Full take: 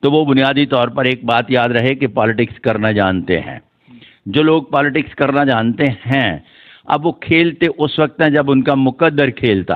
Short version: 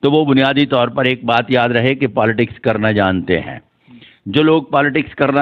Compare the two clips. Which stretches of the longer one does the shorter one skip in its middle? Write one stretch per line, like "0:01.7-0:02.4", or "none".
none